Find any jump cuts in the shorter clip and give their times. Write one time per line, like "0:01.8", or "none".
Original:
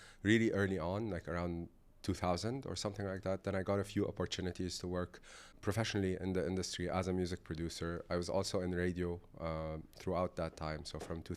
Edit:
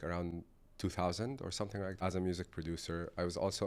0:02.0